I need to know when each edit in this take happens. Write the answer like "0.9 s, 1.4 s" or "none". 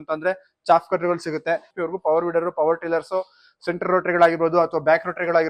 1.7 s